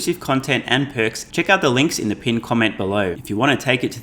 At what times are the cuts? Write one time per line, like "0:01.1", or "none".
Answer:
0:01.2
0:03.2

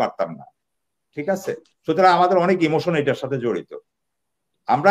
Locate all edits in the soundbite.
none

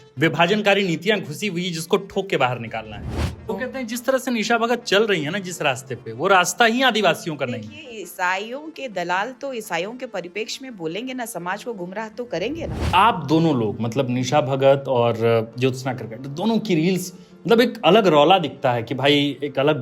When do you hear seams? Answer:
0:03.3
0:12.8

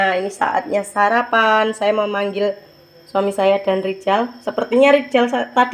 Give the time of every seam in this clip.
none

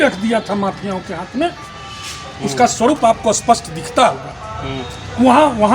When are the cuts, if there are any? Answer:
none

